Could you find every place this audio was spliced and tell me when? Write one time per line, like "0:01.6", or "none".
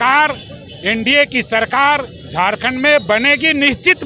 none